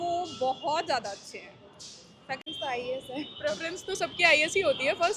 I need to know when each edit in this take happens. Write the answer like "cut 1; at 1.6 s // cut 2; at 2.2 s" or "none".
cut 1; at 2.4 s